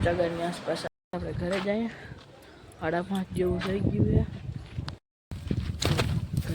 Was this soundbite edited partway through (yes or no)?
yes